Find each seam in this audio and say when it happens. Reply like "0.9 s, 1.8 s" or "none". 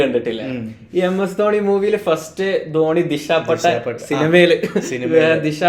none